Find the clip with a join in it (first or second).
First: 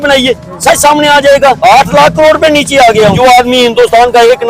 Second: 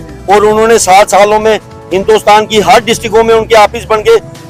first